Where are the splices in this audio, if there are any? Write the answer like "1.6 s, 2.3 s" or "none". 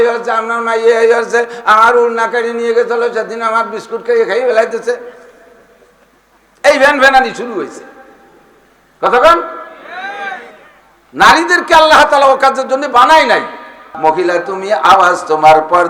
13.9 s